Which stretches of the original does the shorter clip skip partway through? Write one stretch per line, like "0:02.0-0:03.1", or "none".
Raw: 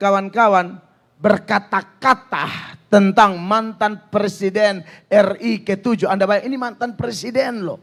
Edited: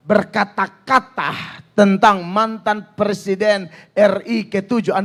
none